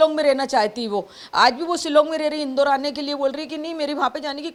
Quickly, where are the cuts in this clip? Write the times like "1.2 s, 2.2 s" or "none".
none